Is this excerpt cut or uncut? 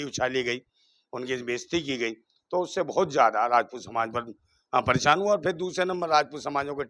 uncut